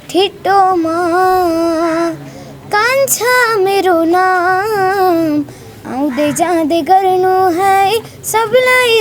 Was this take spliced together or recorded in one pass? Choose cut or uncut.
uncut